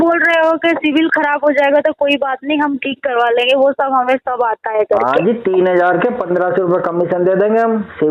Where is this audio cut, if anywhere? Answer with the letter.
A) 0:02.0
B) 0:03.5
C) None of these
C